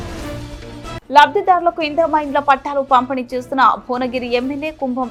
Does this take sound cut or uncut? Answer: uncut